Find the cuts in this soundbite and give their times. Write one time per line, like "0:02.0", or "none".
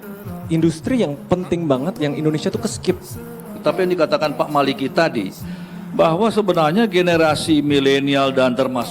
0:03.6